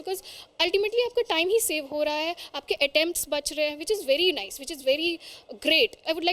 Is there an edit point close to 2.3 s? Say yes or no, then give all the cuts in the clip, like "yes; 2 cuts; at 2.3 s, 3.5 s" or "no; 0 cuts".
no; 0 cuts